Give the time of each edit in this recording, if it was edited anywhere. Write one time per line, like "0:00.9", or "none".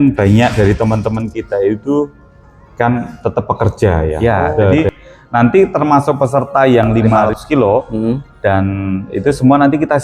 0:04.6
0:07.2